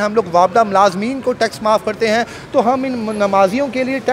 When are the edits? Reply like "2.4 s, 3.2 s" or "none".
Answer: none

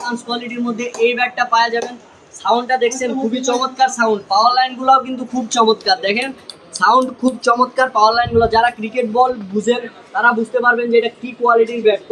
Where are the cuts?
none

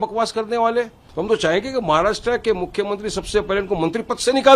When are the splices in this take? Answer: 1.0 s

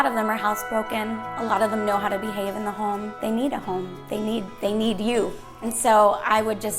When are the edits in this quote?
3.2 s, 5.6 s

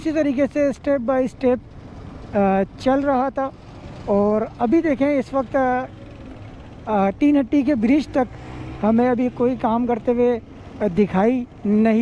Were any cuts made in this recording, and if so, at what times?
none

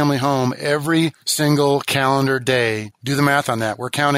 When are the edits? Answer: 1.2 s, 2.9 s

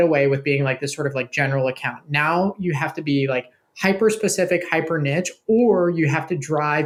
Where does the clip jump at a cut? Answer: none

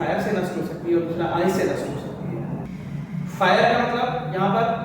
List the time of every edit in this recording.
2.6 s

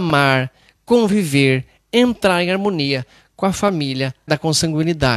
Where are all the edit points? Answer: 4.2 s

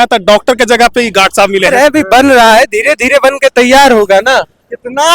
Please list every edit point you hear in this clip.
1.7 s

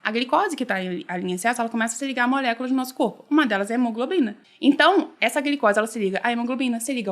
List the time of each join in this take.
4.4 s

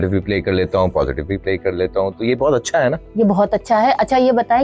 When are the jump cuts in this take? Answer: none

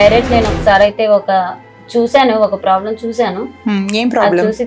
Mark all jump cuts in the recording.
none

